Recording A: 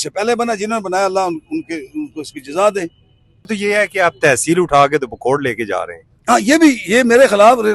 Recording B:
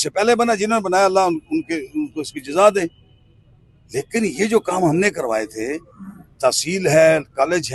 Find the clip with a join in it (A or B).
A